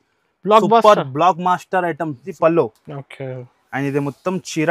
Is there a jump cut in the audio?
yes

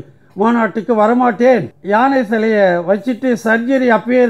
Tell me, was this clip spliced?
yes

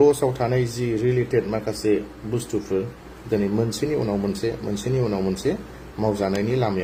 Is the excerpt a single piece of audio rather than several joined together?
yes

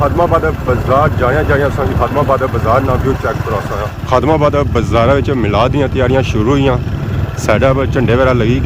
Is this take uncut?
yes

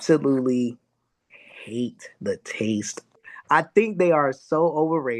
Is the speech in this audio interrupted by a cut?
yes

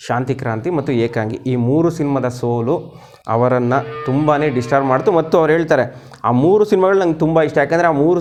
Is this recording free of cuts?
yes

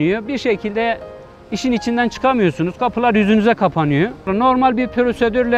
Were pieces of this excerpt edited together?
yes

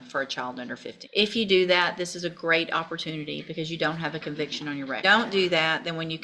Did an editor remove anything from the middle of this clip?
yes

